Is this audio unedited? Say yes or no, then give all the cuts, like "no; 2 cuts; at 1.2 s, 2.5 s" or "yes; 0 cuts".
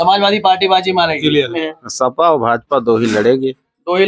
no; 1 cut; at 1.7 s